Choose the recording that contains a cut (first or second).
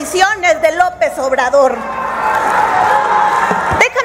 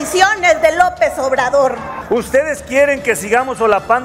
second